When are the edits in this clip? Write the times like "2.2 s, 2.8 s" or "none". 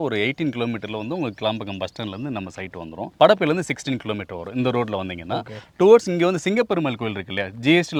none